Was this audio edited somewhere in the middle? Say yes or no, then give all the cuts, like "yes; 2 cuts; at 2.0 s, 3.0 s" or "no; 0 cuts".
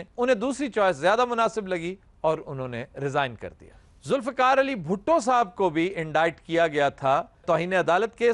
no; 0 cuts